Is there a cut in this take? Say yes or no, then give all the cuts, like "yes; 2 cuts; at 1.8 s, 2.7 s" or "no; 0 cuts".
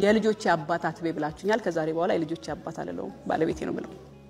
no; 0 cuts